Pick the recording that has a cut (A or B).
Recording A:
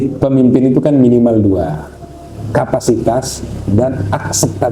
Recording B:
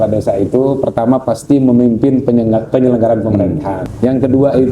B